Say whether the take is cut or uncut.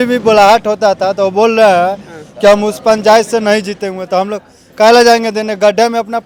uncut